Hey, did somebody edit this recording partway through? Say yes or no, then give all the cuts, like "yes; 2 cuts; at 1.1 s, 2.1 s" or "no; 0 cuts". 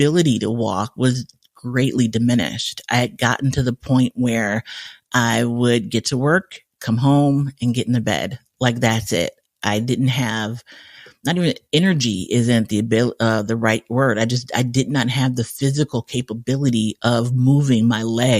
no; 0 cuts